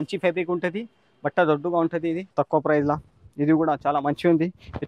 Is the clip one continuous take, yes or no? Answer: no